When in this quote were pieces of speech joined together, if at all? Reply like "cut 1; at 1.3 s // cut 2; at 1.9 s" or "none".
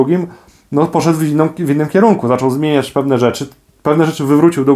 none